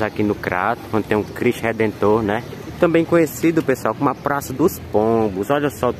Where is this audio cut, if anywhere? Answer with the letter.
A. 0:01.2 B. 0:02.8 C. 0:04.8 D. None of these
B